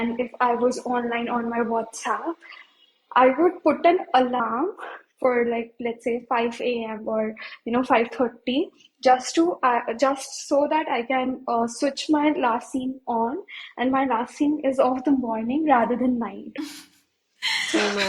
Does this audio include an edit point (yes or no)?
no